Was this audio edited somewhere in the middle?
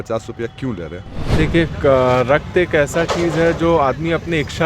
yes; 1 cut; at 1.2 s

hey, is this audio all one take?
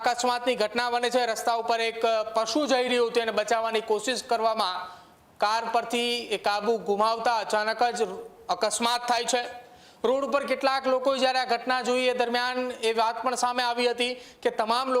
yes; 0 cuts

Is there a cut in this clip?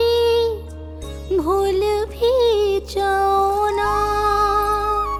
no; 0 cuts

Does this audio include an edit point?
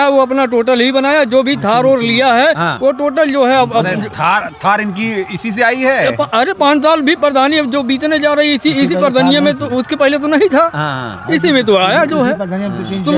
no; 0 cuts

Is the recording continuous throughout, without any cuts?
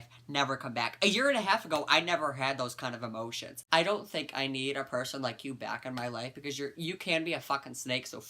no; 1 cut; at 3.5 s

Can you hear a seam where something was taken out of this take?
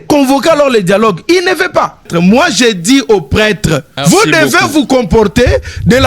yes; 2 cuts; at 2.1 s, 3.9 s

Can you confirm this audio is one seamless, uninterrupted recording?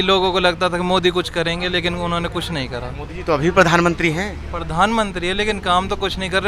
yes; 0 cuts

